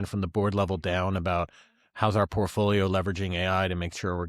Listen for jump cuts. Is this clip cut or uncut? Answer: uncut